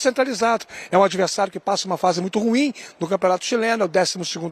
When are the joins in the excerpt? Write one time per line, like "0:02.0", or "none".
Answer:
none